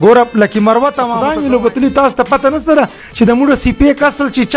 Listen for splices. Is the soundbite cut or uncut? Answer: cut